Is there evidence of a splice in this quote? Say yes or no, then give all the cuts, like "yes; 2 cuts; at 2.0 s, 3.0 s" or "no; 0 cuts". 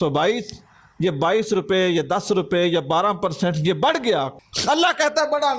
yes; 1 cut; at 4.4 s